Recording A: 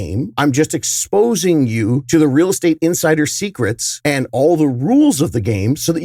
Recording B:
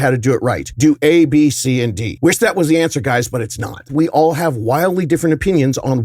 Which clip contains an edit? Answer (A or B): B